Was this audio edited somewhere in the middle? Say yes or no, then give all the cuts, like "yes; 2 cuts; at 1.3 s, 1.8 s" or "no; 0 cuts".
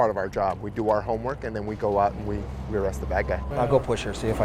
yes; 1 cut; at 3.5 s